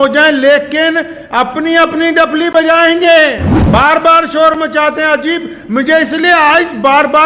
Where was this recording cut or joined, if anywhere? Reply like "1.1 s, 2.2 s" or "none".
3.5 s

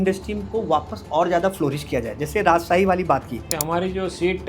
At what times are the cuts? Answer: 3.6 s

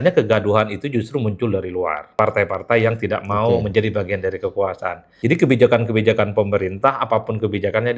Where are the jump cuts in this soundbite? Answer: 2.1 s, 5.1 s

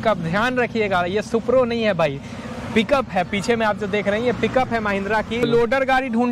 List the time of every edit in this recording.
5.4 s

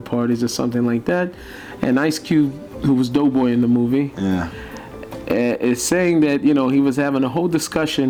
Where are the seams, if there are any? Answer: none

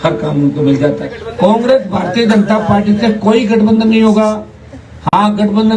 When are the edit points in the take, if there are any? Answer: 1.2 s

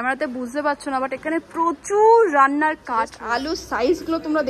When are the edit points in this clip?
3.2 s

